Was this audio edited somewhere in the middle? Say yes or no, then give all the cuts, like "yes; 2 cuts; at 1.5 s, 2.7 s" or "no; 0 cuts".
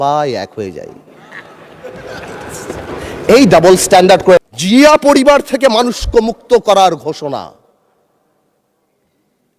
yes; 1 cut; at 4.4 s